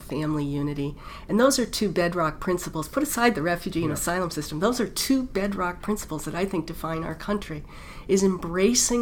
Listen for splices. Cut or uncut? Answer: uncut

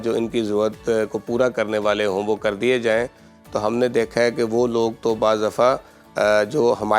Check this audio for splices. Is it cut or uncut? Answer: uncut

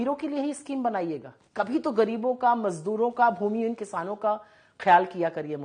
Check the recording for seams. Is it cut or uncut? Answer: uncut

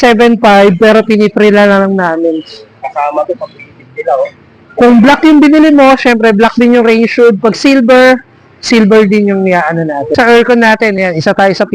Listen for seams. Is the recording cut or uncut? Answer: cut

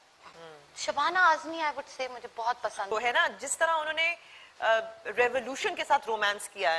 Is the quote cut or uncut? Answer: cut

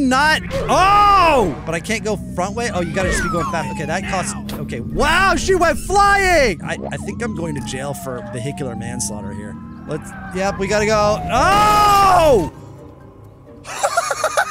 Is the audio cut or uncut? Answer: cut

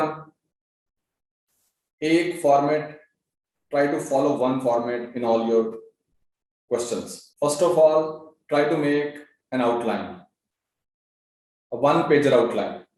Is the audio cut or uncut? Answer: uncut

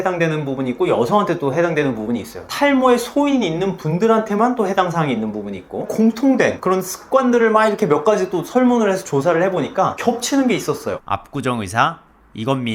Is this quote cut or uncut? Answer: cut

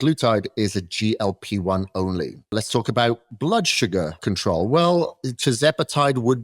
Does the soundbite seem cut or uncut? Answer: cut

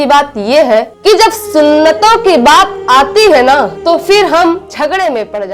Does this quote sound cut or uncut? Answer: uncut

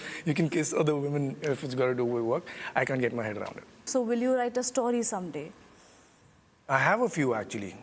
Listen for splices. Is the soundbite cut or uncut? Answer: cut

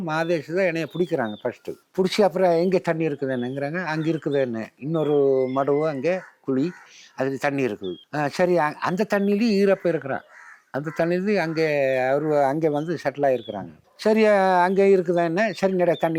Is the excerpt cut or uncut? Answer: uncut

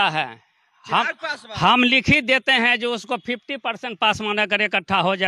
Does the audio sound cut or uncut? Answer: uncut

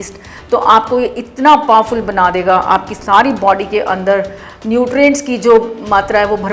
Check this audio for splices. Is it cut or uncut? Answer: uncut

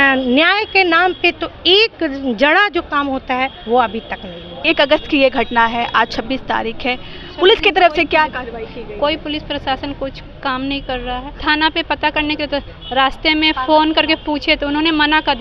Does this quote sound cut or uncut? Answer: cut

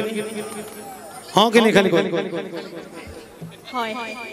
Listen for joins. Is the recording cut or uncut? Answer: uncut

